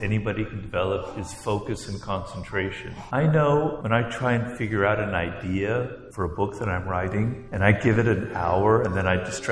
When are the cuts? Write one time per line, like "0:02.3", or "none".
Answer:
0:02.9
0:03.8
0:06.0
0:07.4